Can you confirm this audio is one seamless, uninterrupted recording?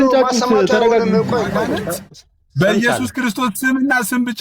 no; 1 cut; at 1.6 s

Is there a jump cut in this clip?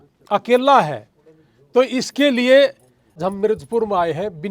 yes; 1 cut; at 3.2 s

